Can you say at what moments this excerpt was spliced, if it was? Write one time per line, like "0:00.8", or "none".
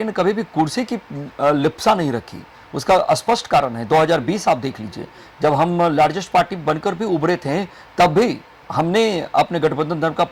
none